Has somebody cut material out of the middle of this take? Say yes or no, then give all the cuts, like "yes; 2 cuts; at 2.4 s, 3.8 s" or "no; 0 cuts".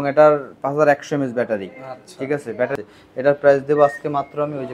yes; 1 cut; at 2.7 s